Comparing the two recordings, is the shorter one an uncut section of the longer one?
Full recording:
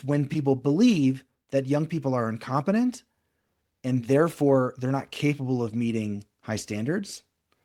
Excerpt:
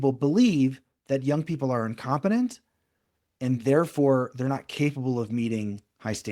yes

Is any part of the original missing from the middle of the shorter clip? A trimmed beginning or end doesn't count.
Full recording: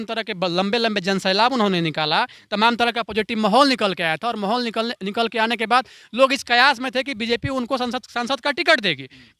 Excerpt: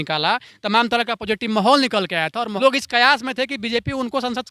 yes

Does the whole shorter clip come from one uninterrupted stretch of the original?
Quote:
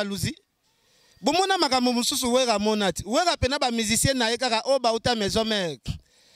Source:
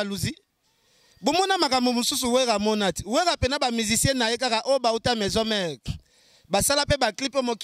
yes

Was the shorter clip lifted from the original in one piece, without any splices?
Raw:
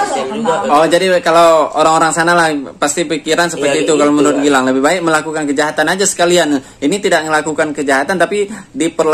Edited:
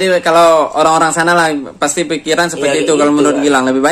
yes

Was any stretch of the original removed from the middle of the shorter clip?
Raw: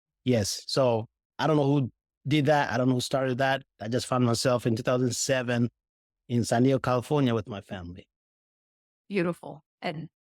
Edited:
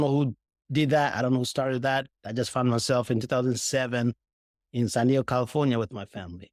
no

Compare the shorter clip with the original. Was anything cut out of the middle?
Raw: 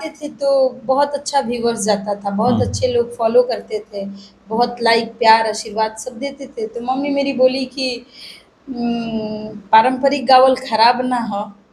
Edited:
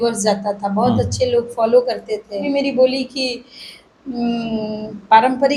yes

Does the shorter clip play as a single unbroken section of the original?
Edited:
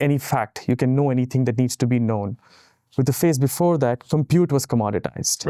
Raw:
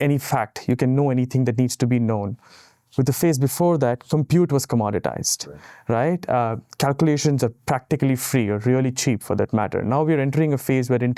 yes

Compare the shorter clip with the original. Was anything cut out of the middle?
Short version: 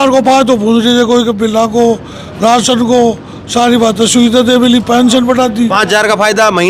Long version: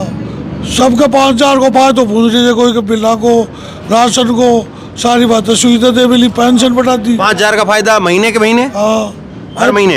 no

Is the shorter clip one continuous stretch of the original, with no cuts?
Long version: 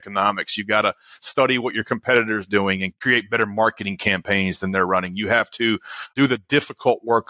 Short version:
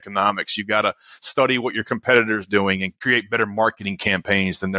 yes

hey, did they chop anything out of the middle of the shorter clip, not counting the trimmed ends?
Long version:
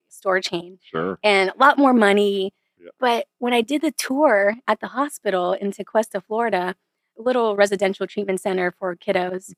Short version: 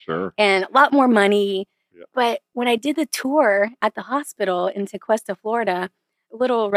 no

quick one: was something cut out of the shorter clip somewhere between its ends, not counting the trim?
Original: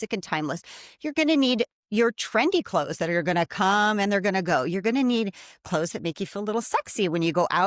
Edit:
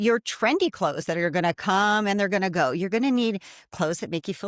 no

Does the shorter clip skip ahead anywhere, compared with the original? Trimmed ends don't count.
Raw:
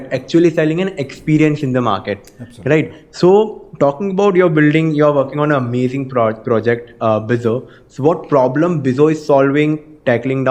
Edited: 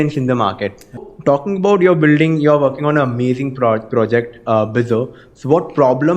yes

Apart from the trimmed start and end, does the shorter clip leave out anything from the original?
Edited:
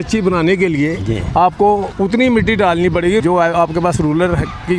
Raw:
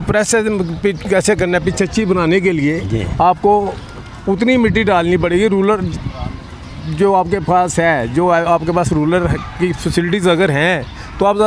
yes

